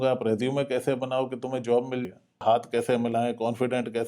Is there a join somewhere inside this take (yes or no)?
yes